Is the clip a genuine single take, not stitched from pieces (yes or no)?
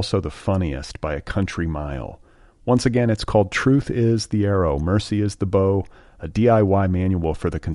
yes